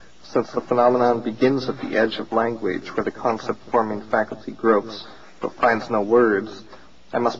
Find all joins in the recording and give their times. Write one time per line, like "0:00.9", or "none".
0:05.8